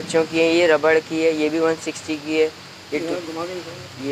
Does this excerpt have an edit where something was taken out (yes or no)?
no